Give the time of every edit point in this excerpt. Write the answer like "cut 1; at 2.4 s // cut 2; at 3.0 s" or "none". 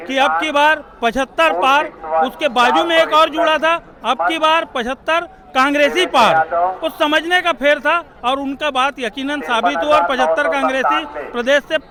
none